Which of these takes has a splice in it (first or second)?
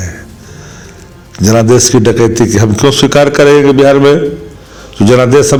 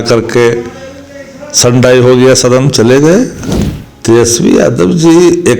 second